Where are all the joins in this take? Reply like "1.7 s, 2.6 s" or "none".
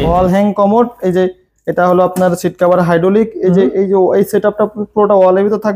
none